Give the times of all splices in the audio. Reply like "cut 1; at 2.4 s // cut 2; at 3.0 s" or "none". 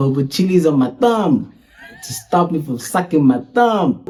none